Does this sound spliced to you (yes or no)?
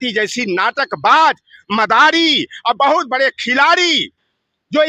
no